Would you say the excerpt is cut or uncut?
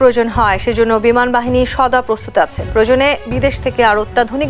uncut